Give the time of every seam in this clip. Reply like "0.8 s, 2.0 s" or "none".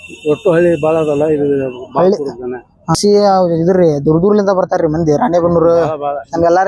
3.0 s